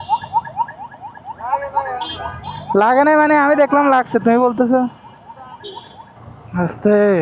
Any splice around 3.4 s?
no; 1 cut; at 6.1 s

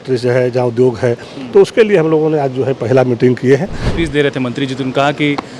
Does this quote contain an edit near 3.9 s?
yes; 1 cut; at 3.9 s

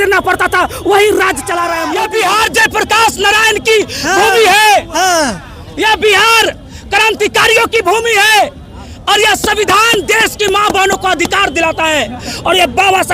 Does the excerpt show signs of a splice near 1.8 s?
yes; 1 cut; at 1.8 s

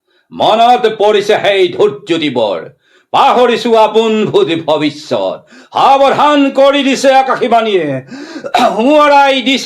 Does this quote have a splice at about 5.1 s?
no; 0 cuts

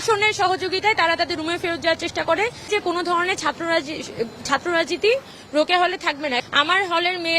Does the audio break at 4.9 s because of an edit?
no; 2 cuts; at 2.7 s, 6.4 s

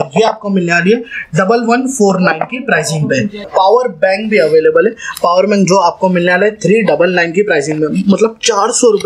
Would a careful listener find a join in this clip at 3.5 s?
yes; 1 cut; at 3.5 s

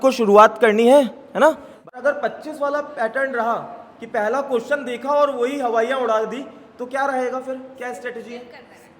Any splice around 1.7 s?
yes; 1 cut; at 1.7 s

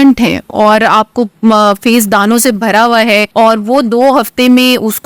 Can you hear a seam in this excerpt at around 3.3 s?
yes; 1 cut; at 3.3 s

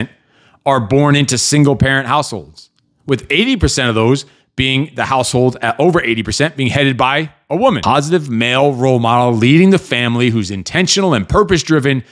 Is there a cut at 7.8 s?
yes; 1 cut; at 7.8 s

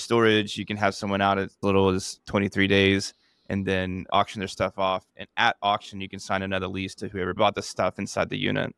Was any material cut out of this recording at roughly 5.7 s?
no; 2 cuts; at 1.6 s, 7.4 s

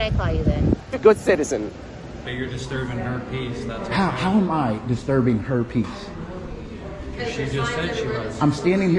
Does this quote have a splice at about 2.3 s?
yes; 1 cut; at 2.3 s

